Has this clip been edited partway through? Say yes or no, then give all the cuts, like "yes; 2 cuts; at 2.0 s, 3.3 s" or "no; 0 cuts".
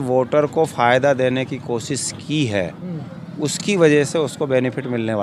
no; 0 cuts